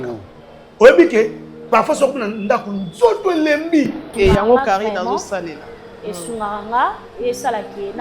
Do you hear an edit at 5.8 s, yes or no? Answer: no